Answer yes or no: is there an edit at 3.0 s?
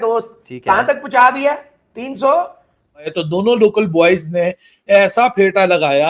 yes